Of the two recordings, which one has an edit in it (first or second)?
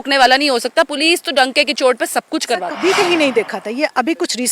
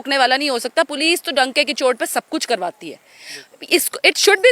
first